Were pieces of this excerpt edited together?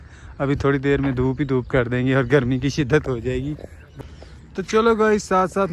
yes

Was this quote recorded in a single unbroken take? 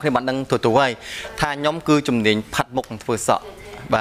yes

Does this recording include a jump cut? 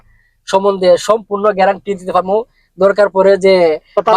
no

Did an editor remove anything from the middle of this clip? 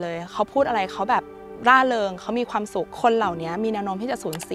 yes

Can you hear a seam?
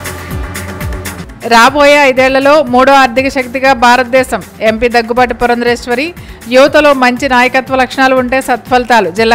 yes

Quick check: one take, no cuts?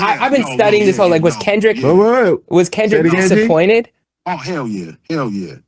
yes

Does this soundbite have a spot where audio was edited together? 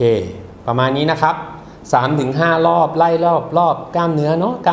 no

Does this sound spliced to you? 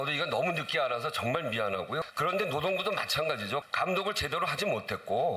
yes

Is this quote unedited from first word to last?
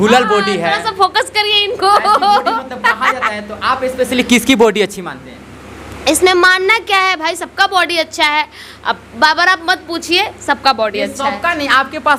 yes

